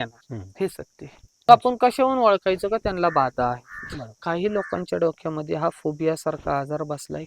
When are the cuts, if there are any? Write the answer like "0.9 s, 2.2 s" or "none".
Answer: 1.5 s